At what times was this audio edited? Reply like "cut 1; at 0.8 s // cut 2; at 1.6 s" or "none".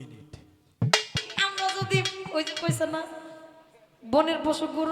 cut 1; at 1.2 s